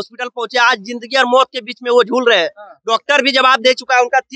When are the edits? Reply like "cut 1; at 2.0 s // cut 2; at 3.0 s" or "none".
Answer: none